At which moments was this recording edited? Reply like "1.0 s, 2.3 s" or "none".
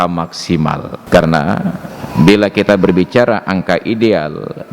0.9 s